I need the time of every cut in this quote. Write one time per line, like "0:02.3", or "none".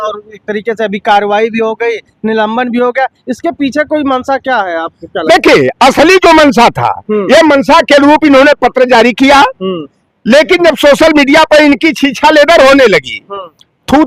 none